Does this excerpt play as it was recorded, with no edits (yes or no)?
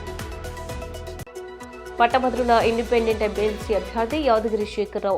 no